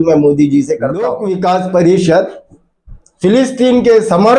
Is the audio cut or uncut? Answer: cut